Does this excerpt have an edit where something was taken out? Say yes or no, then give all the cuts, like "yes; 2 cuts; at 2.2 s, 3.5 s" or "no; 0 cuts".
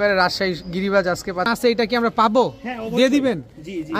yes; 1 cut; at 1.5 s